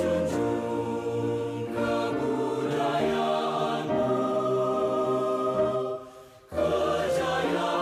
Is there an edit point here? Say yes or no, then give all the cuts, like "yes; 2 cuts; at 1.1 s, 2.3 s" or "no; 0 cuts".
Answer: no; 0 cuts